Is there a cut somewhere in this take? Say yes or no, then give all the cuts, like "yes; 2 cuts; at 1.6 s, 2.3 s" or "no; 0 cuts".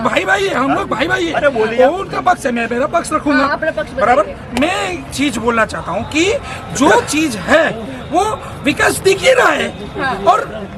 no; 0 cuts